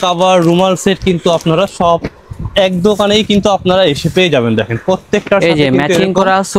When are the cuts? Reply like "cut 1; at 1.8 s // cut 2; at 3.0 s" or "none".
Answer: none